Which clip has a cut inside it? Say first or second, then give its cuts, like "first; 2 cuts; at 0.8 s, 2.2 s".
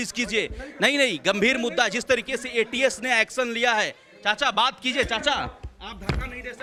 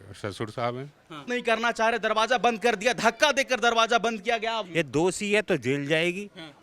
second; 2 cuts; at 1.2 s, 4.6 s